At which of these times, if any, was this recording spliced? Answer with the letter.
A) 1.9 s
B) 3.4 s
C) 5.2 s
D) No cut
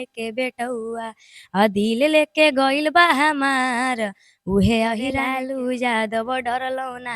C